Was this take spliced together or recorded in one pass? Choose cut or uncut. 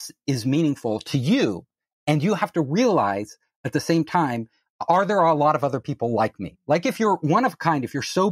uncut